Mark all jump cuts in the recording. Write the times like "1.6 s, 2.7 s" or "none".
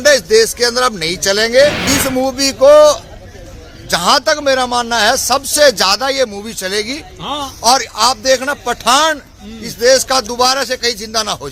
1.8 s